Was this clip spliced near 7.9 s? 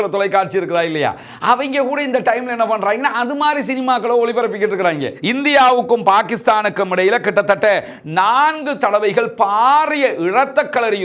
no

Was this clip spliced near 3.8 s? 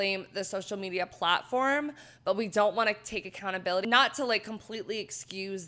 yes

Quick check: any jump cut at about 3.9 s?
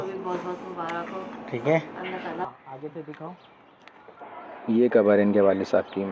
no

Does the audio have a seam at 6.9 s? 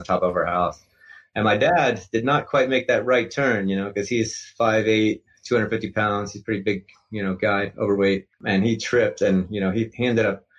no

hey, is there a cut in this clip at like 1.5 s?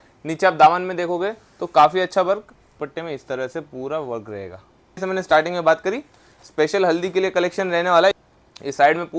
no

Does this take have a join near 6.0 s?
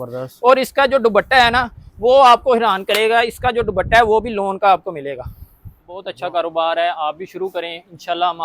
yes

